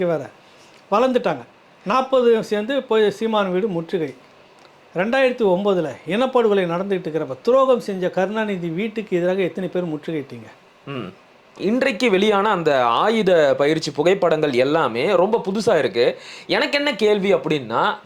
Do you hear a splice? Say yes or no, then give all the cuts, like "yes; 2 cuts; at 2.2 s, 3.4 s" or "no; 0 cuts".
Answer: yes; 1 cut; at 11.6 s